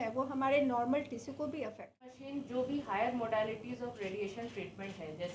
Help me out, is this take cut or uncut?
cut